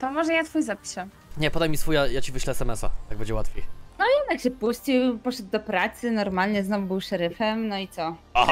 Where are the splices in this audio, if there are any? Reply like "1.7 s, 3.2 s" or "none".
3.8 s